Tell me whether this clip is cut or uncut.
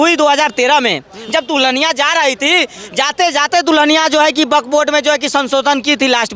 uncut